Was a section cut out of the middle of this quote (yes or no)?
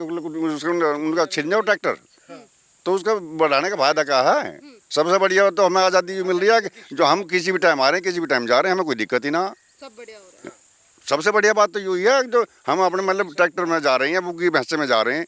no